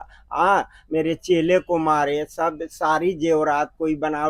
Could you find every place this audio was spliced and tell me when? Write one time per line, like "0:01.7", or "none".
none